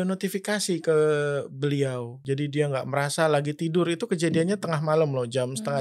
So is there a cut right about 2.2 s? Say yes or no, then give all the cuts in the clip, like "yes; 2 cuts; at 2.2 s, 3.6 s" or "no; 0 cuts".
yes; 1 cut; at 2.2 s